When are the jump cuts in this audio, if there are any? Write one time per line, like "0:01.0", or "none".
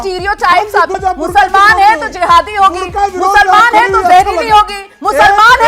0:01.0